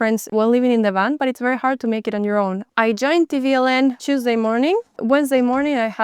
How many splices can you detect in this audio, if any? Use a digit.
2